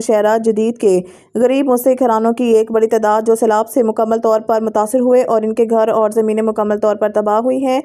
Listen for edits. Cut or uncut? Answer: uncut